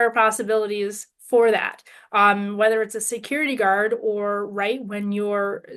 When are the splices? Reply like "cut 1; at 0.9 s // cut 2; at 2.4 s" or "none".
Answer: none